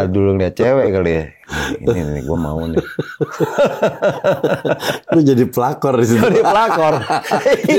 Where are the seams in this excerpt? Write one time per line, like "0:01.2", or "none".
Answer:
none